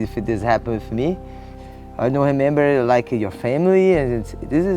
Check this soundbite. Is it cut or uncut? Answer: cut